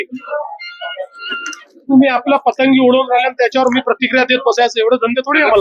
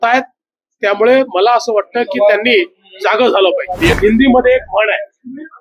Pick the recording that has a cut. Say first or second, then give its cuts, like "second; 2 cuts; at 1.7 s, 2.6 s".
second; 1 cut; at 3.9 s